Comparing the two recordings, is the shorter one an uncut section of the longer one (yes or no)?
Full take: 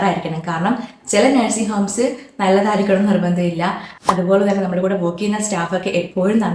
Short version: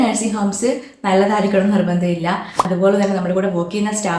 no